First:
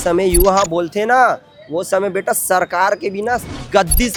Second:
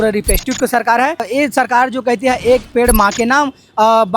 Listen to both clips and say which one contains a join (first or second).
second